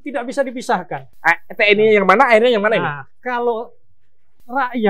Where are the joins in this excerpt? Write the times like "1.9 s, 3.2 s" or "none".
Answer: none